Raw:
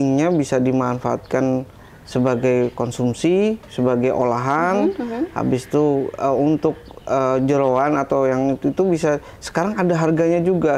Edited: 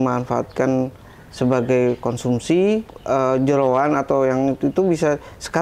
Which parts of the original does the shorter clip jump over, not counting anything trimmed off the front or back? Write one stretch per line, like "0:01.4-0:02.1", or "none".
0:03.7-0:06.9